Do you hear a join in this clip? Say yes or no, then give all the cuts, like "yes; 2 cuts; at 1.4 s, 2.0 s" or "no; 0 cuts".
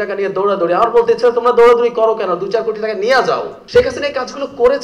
yes; 1 cut; at 3.6 s